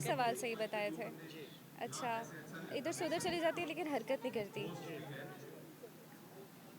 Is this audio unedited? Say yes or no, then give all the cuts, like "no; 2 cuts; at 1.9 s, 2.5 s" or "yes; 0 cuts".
yes; 0 cuts